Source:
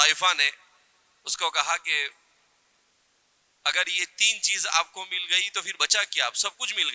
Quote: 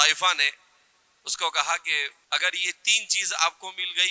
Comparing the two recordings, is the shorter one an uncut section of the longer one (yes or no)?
no